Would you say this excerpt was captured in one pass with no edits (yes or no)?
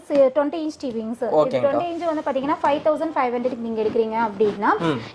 yes